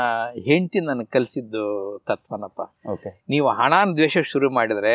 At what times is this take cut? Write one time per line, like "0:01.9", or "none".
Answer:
none